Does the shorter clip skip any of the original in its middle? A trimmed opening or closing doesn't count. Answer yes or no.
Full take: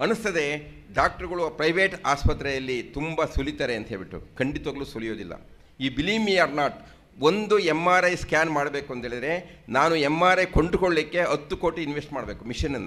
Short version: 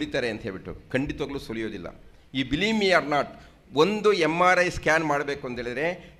no